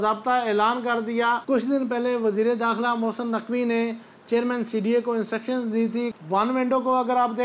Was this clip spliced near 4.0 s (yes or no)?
no